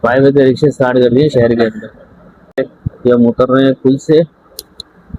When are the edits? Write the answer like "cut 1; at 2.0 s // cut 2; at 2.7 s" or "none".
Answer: cut 1; at 2.6 s